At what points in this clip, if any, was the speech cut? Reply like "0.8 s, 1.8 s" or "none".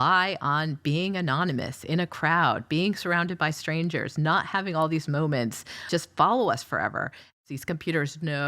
5.8 s, 7.3 s